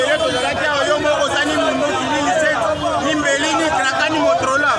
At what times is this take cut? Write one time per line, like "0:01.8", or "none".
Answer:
none